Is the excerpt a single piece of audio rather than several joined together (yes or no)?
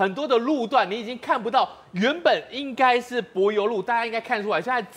yes